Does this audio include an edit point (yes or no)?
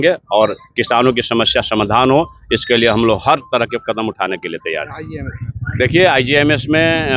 no